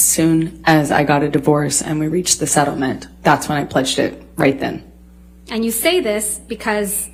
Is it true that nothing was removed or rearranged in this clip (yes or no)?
yes